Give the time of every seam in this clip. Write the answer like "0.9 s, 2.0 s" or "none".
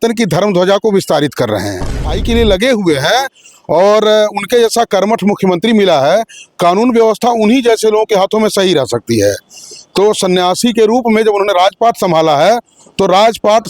2.1 s